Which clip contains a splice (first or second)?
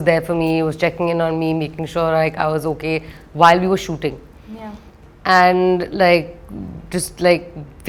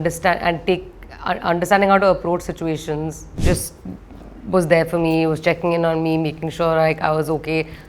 second